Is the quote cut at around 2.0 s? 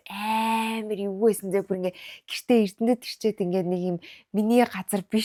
no; 0 cuts

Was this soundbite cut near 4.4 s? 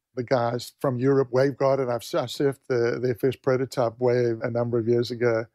yes; 1 cut; at 4.4 s

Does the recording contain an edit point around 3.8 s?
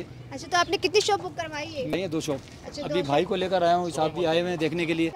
no; 1 cut; at 1.9 s

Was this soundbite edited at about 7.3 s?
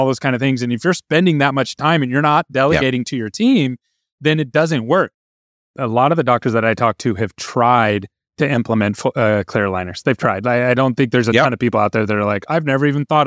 no; 1 cut; at 5.3 s

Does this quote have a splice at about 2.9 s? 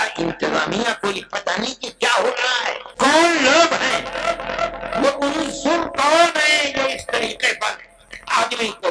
yes; 1 cut; at 2.9 s

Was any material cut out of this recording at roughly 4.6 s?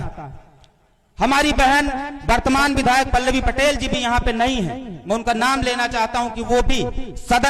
no; 0 cuts

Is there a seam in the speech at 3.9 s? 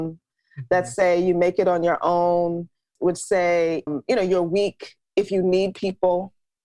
yes; 2 cuts; at 2.9 s, 3.9 s

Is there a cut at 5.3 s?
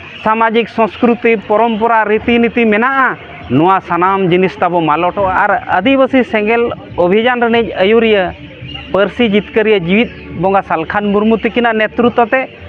yes; 1 cut; at 5.3 s

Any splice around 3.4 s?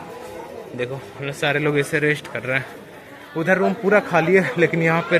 no; 0 cuts

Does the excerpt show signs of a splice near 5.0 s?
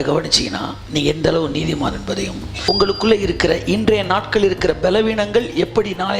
no; 1 cut; at 2.5 s

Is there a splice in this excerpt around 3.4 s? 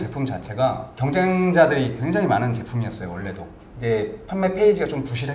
no; 0 cuts

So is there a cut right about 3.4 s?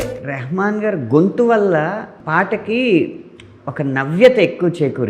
no; 1 cut; at 2.2 s

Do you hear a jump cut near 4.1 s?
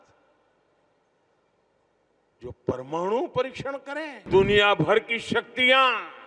yes; 1 cut; at 4.1 s

